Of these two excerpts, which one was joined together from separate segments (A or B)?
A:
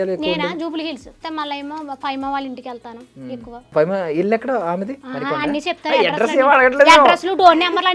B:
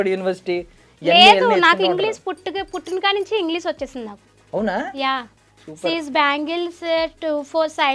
A